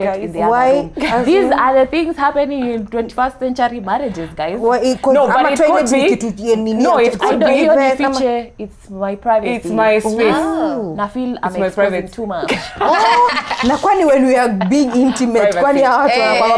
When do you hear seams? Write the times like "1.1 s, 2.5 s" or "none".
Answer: none